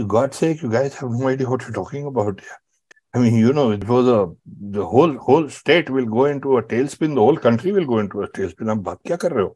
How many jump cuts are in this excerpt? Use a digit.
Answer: 1